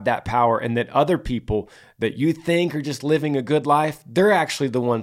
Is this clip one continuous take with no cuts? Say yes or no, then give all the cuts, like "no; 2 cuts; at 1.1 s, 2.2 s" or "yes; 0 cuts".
yes; 0 cuts